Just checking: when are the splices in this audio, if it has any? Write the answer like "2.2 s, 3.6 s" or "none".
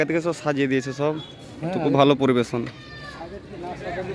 none

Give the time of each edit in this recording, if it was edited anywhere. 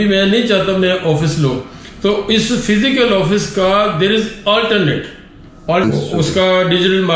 5.8 s

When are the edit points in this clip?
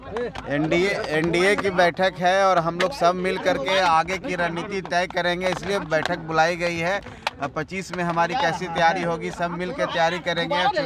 none

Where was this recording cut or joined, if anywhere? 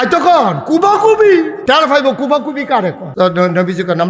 1.5 s, 3.0 s

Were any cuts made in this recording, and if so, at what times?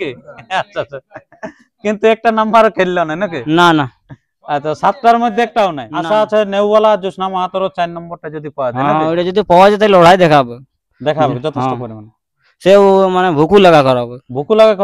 5.9 s

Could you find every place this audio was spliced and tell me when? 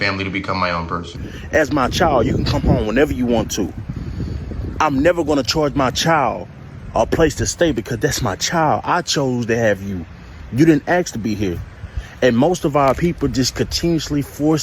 1.1 s

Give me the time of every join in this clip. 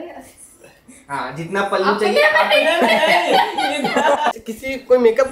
4.4 s

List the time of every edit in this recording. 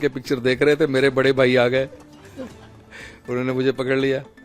none

